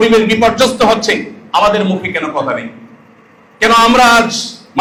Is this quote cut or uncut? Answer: uncut